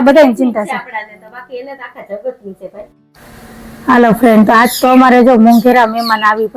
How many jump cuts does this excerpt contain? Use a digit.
0